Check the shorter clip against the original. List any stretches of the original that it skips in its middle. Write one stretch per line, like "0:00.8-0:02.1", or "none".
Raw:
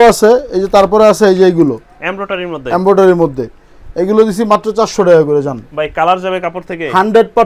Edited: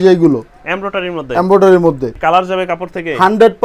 0:03.5-0:05.9

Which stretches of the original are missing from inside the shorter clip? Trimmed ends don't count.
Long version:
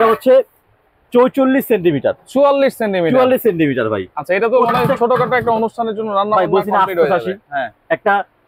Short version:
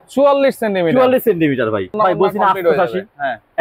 0:04.1-0:06.3

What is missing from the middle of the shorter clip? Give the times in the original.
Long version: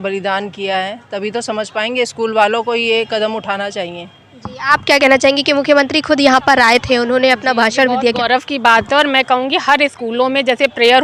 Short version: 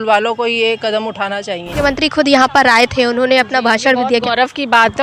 0:04.1-0:05.7

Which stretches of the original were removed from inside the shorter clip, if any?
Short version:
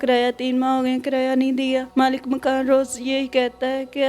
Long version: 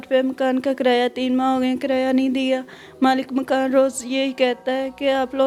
0:02.6-0:02.9

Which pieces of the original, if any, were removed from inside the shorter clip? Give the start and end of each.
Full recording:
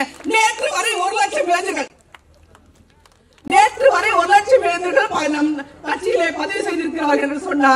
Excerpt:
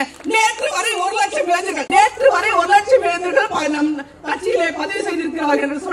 0:01.8-0:03.4

